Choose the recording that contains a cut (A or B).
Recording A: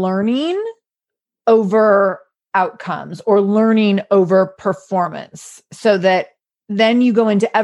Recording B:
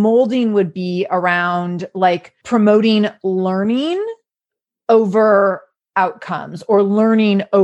B